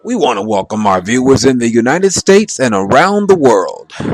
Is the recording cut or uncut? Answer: uncut